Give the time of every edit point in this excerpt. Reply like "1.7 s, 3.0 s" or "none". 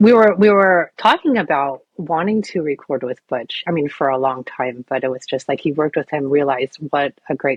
none